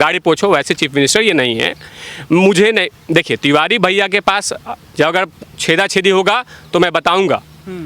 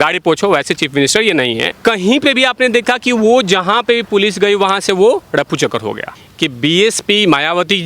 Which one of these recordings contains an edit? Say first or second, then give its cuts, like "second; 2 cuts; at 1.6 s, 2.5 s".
second; 2 cuts; at 1.7 s, 6.1 s